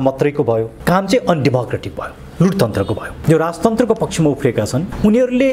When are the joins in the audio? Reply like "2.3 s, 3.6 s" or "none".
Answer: 3.1 s